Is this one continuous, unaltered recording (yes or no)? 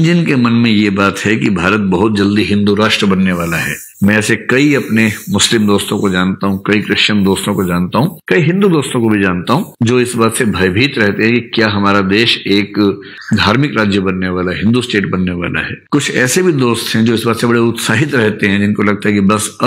yes